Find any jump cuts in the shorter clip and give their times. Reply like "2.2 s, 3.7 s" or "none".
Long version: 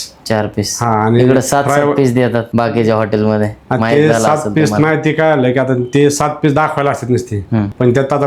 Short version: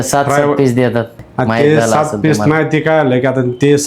1.1 s